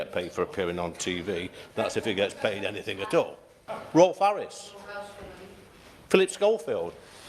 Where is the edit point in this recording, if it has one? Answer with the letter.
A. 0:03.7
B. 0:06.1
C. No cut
A